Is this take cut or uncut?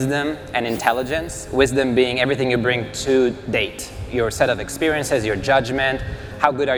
uncut